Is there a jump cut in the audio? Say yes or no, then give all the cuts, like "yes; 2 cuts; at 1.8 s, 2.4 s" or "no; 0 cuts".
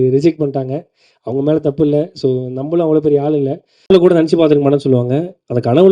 yes; 1 cut; at 3.9 s